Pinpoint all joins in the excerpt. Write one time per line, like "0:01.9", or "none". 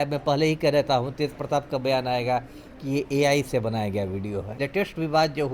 0:04.6